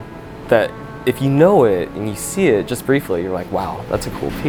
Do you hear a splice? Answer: no; 0 cuts

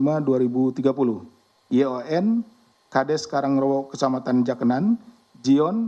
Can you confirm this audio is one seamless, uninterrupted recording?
yes; 0 cuts

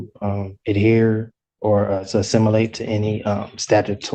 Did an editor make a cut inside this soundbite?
no; 0 cuts

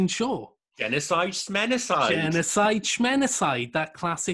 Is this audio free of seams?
yes; 0 cuts

